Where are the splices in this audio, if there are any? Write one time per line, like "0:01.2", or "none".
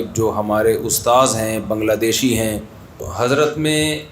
0:03.1